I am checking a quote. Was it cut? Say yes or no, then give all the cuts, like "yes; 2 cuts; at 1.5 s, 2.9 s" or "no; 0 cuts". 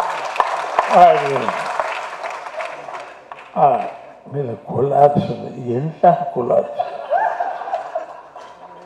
no; 0 cuts